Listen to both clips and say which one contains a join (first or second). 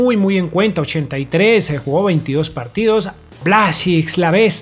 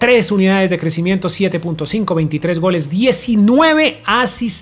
first